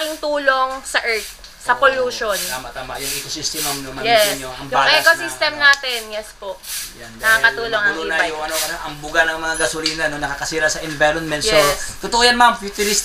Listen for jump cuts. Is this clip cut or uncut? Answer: uncut